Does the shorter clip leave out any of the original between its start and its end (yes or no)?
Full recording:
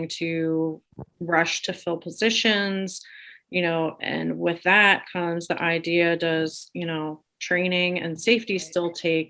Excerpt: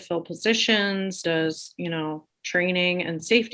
yes